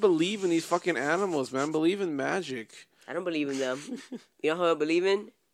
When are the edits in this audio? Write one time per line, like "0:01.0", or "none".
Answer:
none